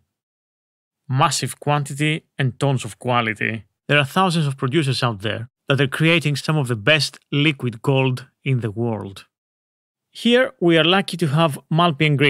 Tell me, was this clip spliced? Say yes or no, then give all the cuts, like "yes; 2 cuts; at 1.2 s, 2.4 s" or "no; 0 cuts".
yes; 1 cut; at 3.7 s